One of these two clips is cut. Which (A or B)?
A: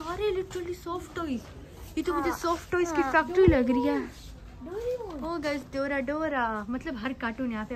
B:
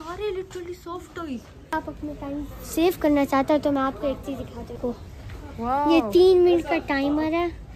B